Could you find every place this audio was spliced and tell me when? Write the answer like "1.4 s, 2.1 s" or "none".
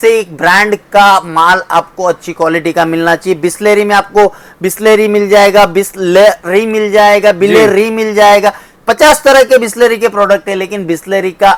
none